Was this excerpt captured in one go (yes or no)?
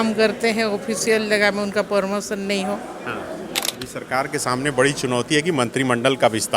no